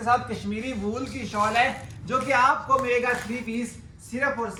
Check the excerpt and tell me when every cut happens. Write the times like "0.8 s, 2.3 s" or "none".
none